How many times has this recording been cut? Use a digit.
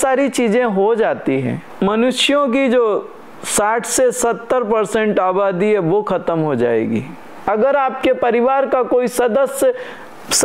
2